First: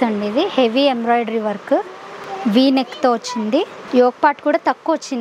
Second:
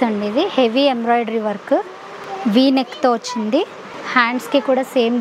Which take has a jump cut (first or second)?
first